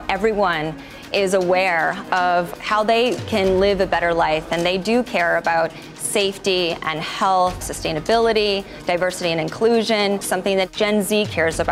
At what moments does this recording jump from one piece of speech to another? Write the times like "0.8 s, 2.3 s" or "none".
2.5 s, 7.7 s, 10.5 s